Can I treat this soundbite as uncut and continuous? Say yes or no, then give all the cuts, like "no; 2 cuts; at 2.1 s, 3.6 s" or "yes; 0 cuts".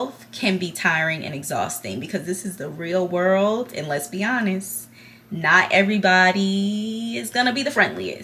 yes; 0 cuts